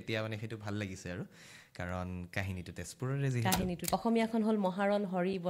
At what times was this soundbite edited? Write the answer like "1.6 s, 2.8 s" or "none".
2.8 s, 3.8 s